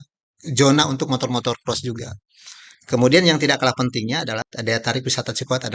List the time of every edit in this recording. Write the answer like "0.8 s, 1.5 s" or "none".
4.4 s